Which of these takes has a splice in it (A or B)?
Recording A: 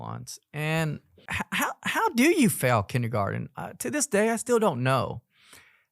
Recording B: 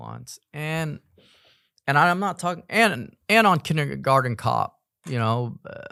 A